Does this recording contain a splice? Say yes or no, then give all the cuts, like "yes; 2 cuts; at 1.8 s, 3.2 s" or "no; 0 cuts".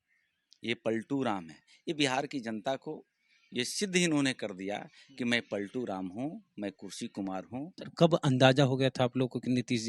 yes; 1 cut; at 7.8 s